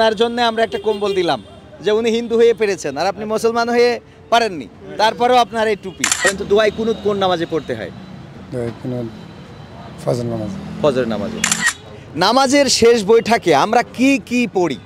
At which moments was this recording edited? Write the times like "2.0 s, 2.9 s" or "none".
6.2 s, 11.8 s

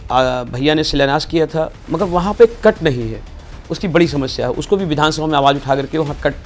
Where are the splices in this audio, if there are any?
1.9 s

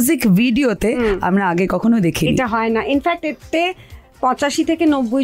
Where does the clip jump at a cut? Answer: none

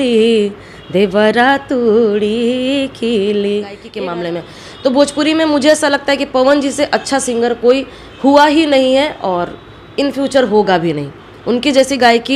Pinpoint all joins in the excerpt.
3.9 s

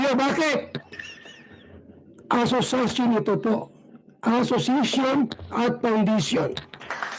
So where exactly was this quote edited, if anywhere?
none

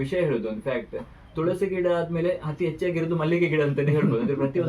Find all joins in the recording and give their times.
none

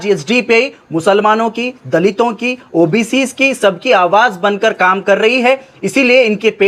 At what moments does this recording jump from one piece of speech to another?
none

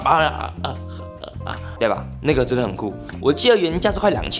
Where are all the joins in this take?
3.0 s

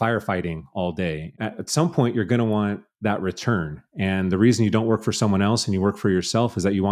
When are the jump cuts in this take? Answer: 1.3 s

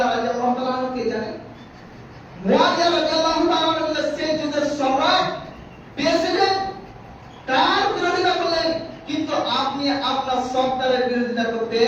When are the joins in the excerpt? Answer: none

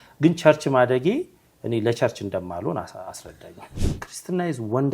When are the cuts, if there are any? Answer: 3.7 s

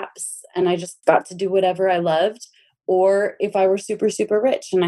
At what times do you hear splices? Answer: 0.9 s

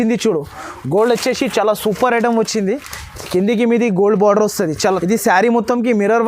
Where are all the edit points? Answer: 4.8 s

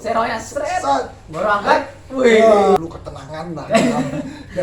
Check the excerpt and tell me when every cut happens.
2.8 s

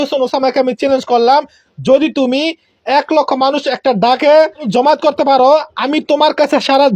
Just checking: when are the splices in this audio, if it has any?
4.6 s

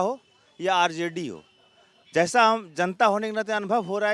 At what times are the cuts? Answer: none

